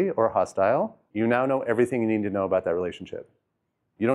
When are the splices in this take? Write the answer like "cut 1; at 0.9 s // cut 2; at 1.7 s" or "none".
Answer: cut 1; at 1.0 s

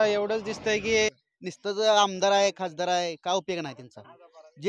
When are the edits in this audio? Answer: cut 1; at 1.3 s

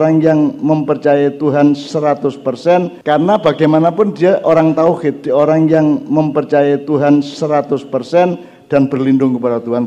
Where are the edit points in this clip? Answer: cut 1; at 3.0 s // cut 2; at 8.4 s

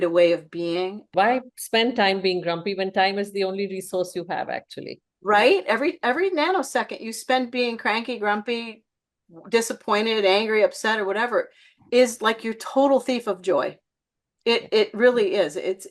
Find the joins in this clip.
cut 1; at 1.1 s

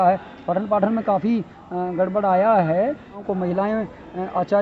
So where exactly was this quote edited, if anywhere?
cut 1; at 3.2 s

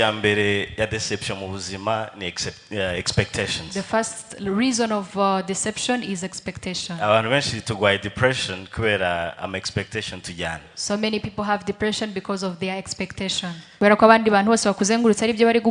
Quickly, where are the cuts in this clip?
cut 1; at 13.6 s

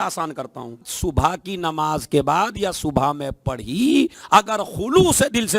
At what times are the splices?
cut 1; at 0.9 s // cut 2; at 4.2 s

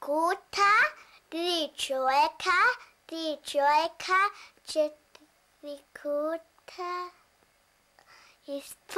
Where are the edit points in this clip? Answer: none

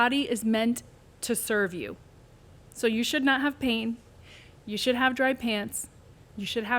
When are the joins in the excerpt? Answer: none

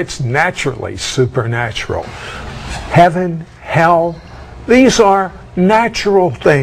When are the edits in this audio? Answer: cut 1; at 1.5 s

